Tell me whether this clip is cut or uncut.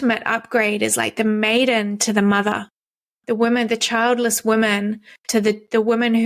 uncut